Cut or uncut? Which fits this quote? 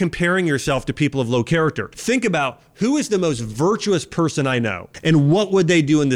cut